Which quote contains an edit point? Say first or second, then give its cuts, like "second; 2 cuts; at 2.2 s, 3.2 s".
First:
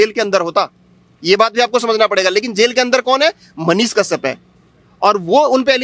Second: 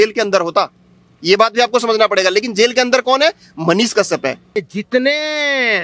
second; 1 cut; at 4.7 s